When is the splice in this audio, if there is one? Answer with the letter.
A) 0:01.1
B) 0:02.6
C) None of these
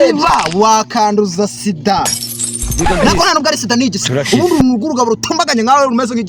C